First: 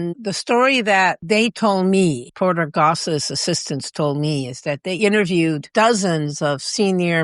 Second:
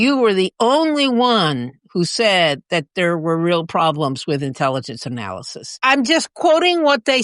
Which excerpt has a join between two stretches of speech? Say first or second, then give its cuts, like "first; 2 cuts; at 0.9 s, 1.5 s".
first; 3 cuts; at 1.2 s, 2.3 s, 5.7 s